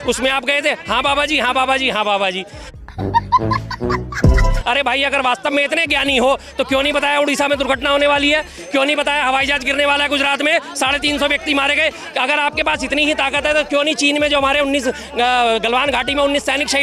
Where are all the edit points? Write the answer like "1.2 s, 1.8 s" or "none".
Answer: none